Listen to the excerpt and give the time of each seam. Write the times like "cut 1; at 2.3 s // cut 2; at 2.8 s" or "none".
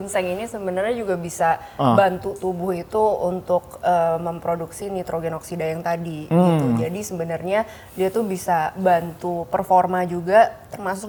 none